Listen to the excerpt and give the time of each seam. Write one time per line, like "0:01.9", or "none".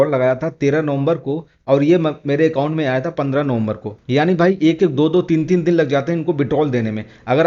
0:03.9

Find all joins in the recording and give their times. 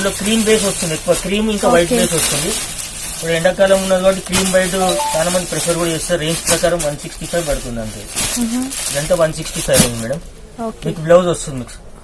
none

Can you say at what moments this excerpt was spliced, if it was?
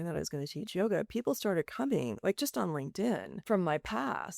0:03.5

